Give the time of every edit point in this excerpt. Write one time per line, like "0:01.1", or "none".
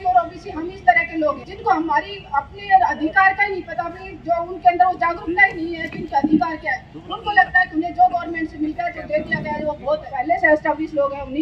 0:01.5
0:10.1